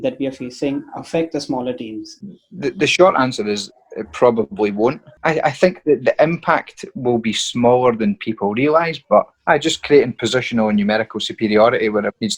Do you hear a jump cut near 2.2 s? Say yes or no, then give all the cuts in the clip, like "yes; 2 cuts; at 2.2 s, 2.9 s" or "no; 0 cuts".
yes; 3 cuts; at 2.2 s, 5.2 s, 9.3 s